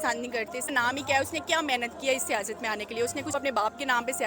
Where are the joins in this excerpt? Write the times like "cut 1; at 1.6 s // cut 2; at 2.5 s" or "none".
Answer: cut 1; at 0.7 s // cut 2; at 3.3 s